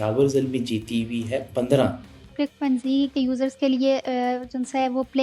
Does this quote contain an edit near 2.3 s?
yes; 1 cut; at 2.3 s

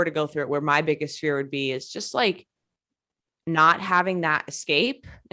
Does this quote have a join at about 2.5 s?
no; 0 cuts

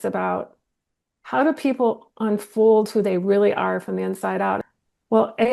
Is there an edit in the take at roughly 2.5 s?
no; 1 cut; at 4.6 s

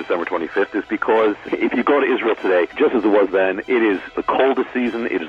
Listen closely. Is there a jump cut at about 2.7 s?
yes; 3 cuts; at 1.5 s, 2.7 s, 4.1 s

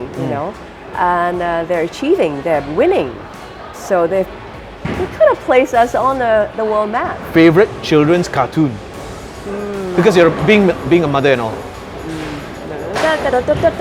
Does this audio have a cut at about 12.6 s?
no; 1 cut; at 7.2 s

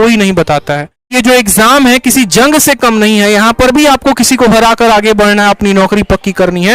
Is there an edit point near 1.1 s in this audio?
yes; 1 cut; at 1.1 s

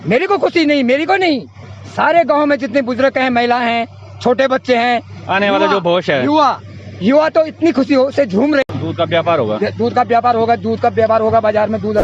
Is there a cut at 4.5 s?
no; 1 cut; at 8.7 s

